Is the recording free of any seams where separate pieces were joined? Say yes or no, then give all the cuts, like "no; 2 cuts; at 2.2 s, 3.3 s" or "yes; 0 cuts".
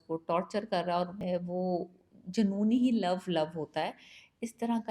no; 1 cut; at 1.2 s